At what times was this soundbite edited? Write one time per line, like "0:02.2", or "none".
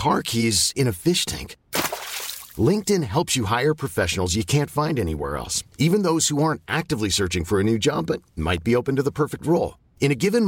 none